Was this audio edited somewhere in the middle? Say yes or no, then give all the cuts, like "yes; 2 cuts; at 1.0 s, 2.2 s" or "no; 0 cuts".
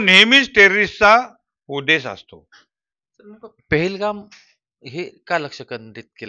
no; 0 cuts